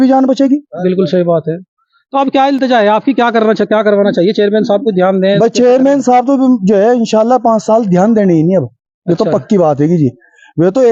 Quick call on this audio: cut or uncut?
uncut